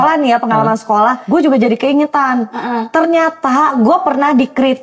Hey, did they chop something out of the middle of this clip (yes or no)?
yes